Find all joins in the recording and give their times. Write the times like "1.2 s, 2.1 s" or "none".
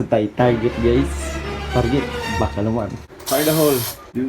3.1 s